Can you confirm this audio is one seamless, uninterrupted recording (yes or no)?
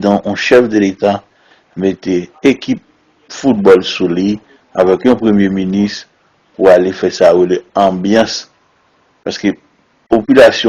yes